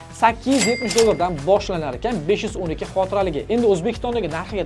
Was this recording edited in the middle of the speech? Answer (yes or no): no